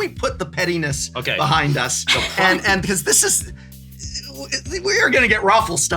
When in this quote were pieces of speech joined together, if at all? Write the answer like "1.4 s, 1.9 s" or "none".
none